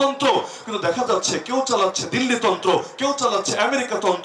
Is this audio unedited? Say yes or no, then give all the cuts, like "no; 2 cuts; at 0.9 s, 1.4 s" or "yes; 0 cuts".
yes; 0 cuts